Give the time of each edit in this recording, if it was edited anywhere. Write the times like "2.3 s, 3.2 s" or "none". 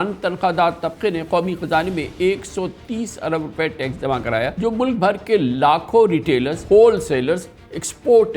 4.5 s, 6.6 s

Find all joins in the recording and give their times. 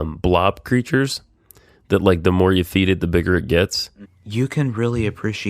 3.8 s

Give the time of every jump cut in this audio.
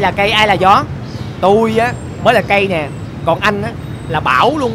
none

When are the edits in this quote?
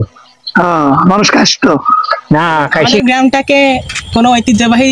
3.0 s

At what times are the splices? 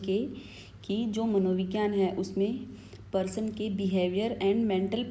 none

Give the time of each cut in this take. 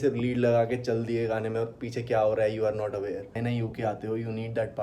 3.3 s

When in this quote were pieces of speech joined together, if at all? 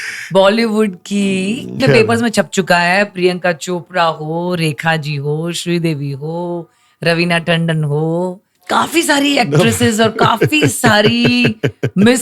1.8 s, 8.5 s

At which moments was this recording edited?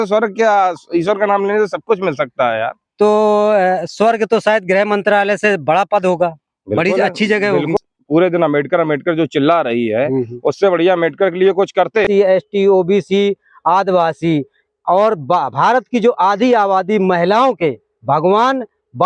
7.8 s, 12.1 s

